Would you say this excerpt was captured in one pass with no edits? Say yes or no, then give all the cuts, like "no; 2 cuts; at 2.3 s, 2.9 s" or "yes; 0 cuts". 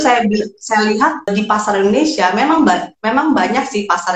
no; 1 cut; at 1.3 s